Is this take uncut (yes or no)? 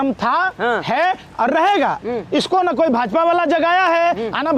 yes